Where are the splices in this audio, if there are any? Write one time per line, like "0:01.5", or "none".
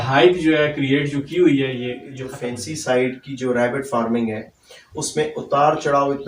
0:02.2